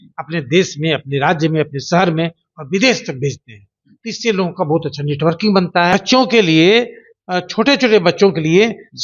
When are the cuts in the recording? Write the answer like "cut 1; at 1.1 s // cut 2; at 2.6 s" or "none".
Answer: cut 1; at 5.9 s